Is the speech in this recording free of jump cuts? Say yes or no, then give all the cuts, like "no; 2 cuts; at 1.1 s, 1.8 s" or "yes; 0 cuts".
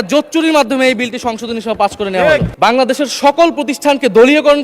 no; 1 cut; at 2.5 s